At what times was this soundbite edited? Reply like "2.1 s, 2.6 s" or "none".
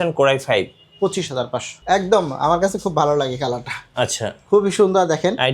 1.7 s